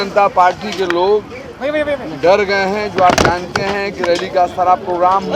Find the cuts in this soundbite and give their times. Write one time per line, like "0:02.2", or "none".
none